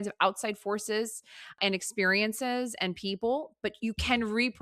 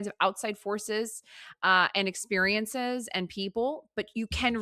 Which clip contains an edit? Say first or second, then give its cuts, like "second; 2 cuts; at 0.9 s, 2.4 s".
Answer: first; 1 cut; at 1.6 s